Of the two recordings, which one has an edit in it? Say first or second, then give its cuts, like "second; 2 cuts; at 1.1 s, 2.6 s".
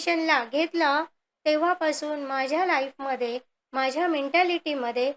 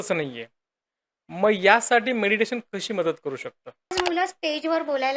second; 1 cut; at 3.9 s